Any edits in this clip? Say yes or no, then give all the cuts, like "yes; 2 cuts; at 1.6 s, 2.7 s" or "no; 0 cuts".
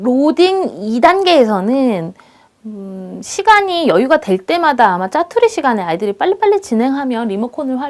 yes; 1 cut; at 1.0 s